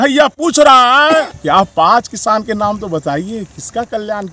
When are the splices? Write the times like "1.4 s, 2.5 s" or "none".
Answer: 1.4 s